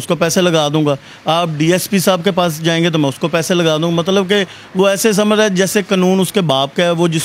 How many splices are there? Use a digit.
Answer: 0